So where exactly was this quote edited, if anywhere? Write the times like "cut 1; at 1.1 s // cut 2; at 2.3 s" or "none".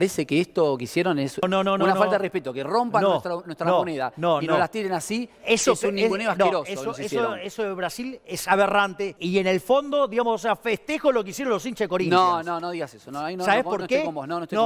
cut 1; at 1.5 s // cut 2; at 9.2 s